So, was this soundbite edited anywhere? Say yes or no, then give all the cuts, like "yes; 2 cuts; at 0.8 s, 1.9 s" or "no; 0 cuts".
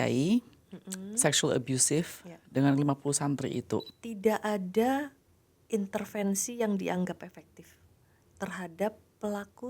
yes; 1 cut; at 4.0 s